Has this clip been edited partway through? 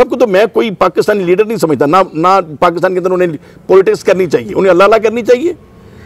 no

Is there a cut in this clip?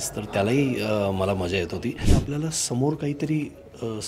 yes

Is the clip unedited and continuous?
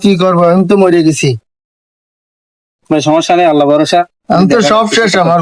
yes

